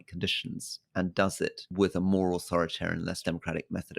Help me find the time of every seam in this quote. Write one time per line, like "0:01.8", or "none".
0:01.6
0:03.2